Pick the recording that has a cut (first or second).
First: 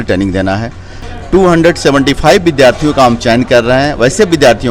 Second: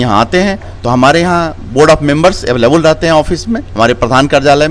first